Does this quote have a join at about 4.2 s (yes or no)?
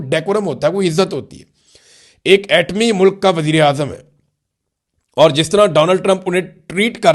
no